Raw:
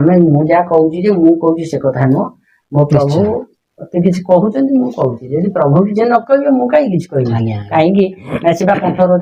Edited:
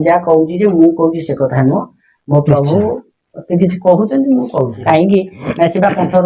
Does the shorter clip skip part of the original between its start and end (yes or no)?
yes